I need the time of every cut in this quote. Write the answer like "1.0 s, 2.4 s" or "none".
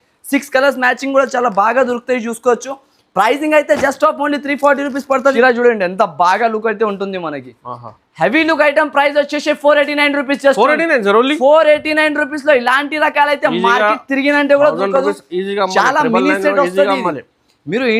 5.3 s